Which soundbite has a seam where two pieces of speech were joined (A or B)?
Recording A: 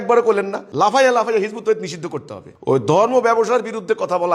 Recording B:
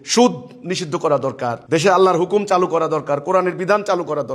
B